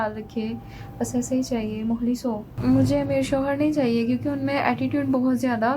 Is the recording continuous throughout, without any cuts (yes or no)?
no